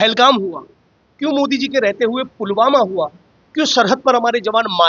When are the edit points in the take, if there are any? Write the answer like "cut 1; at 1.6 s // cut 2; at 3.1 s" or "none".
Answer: none